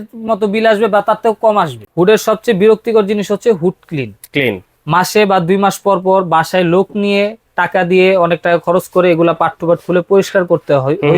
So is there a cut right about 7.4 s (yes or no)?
no